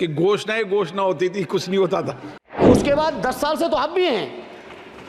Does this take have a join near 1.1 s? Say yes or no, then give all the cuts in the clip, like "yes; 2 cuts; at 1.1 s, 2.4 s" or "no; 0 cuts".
no; 1 cut; at 2.6 s